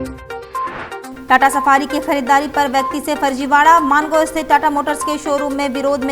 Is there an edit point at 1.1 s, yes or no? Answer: yes